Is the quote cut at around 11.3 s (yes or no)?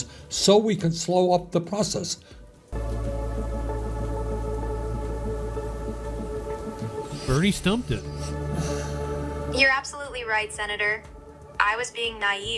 no